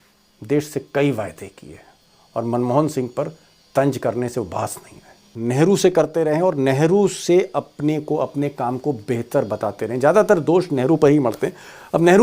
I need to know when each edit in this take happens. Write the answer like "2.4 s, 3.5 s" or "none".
5.3 s